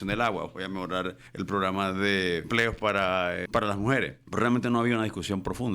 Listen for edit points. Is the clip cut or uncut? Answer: cut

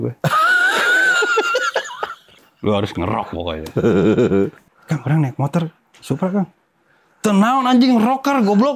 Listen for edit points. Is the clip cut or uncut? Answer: cut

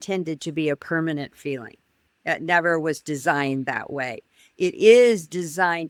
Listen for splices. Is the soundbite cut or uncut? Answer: uncut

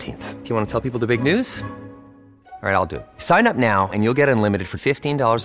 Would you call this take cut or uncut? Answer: uncut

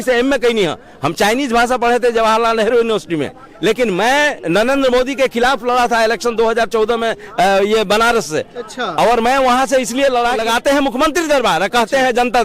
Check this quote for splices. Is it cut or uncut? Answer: cut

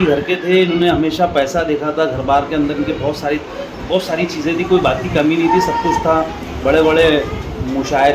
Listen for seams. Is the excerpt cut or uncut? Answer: uncut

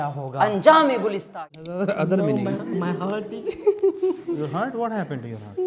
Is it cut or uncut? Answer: cut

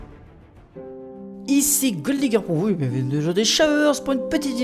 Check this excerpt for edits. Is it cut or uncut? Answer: uncut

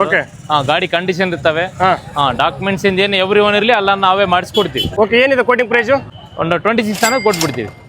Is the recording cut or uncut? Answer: cut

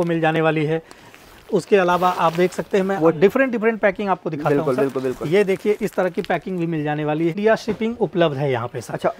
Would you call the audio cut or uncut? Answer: cut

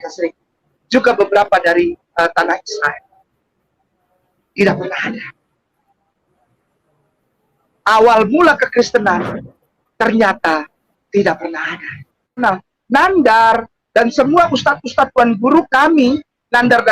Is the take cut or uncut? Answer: cut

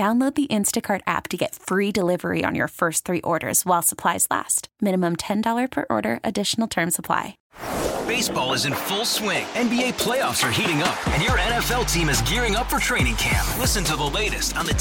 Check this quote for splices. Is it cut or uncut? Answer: cut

